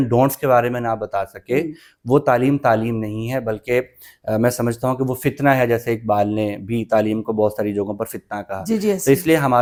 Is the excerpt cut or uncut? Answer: uncut